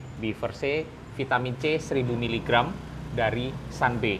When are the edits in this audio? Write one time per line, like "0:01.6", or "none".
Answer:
none

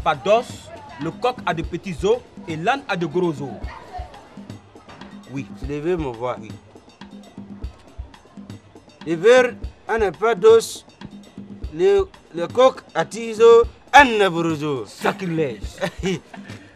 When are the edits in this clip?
0:04.5

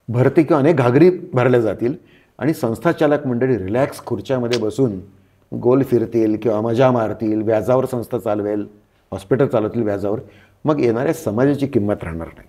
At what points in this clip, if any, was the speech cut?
none

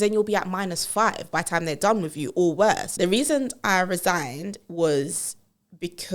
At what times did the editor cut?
0:02.9

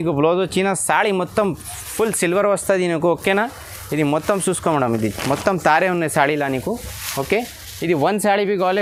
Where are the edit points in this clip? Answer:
none

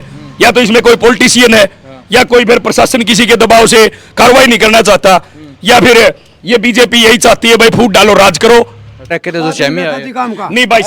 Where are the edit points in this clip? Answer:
0:09.1

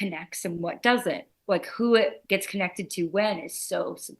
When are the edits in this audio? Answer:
0:01.3

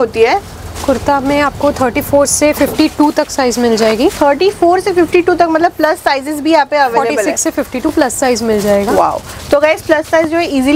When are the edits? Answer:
none

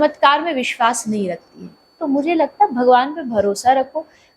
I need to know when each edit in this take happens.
0:02.0

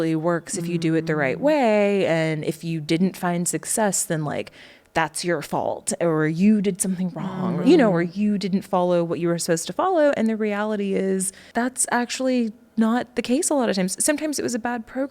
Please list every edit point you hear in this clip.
0:11.4

